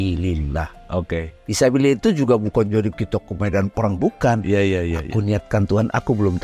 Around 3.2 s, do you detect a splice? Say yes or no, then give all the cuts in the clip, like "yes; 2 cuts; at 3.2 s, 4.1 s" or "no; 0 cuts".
no; 0 cuts